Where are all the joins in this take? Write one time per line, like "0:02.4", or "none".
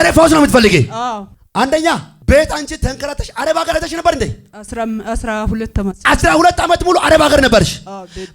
0:01.3
0:02.1